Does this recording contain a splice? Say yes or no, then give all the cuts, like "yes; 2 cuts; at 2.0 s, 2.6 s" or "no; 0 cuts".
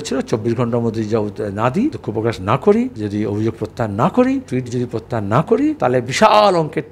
yes; 4 cuts; at 2.0 s, 3.0 s, 4.5 s, 5.8 s